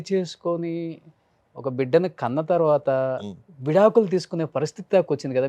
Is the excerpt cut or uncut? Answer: uncut